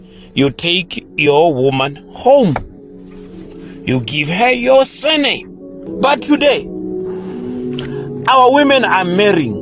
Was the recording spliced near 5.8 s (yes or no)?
yes